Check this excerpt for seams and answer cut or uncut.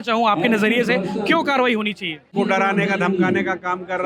cut